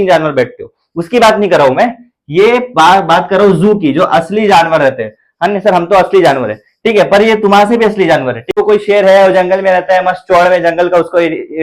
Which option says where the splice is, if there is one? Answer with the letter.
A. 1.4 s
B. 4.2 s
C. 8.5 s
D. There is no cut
C